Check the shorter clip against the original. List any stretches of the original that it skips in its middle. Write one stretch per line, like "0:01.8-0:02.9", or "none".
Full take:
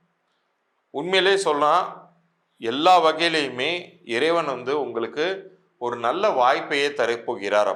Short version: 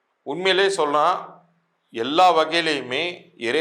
none

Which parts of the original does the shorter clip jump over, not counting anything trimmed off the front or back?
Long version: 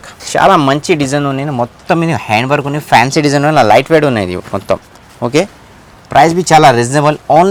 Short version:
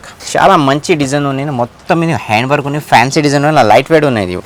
none

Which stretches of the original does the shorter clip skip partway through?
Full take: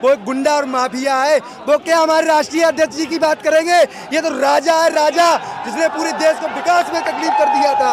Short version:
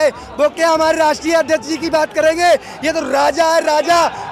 none

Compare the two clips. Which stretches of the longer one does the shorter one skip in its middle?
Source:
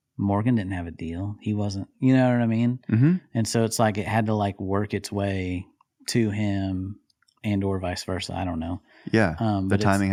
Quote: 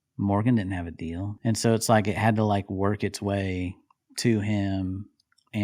0:01.4-0:03.3

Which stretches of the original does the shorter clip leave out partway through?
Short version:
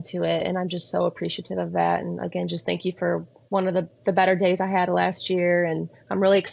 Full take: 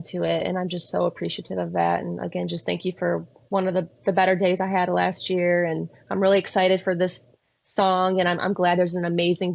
none

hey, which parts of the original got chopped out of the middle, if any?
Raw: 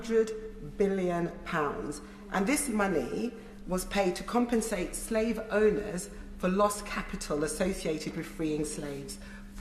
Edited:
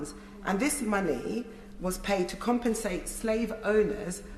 none

